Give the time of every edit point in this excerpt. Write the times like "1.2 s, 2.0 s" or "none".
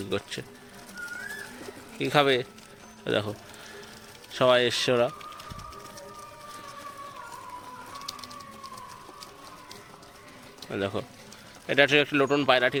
none